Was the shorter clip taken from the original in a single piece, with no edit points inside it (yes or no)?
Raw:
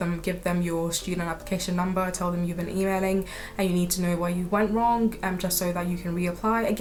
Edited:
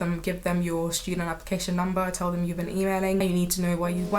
no